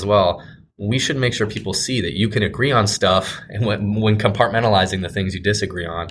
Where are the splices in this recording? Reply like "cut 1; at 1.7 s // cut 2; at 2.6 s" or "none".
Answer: none